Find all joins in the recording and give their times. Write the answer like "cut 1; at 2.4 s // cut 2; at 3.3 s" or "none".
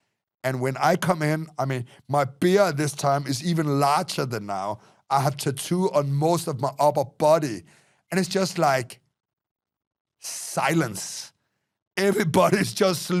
none